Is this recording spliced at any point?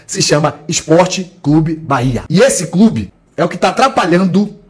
no; 0 cuts

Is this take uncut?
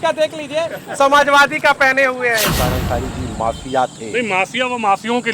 no; 1 cut; at 2.5 s

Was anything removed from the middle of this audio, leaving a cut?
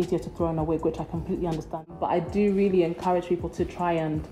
yes; 1 cut; at 1.9 s

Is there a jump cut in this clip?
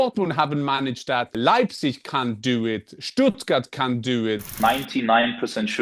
yes; 2 cuts; at 1.3 s, 4.5 s

